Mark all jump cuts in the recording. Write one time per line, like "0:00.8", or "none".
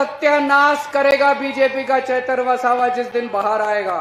none